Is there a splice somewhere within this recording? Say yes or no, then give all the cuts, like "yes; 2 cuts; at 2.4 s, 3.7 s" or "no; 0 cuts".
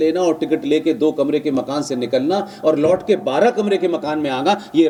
no; 0 cuts